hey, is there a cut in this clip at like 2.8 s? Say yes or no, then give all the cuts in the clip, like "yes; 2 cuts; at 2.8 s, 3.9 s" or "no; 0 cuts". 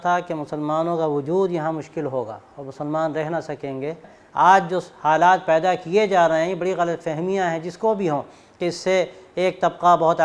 no; 1 cut; at 4.2 s